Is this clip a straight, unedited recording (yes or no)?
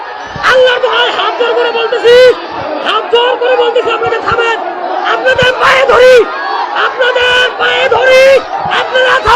yes